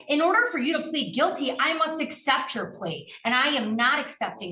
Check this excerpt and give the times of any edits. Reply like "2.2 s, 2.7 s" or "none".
none